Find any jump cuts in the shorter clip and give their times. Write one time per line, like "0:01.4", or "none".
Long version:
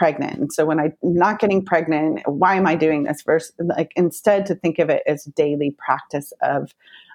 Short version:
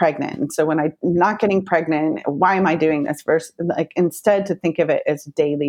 none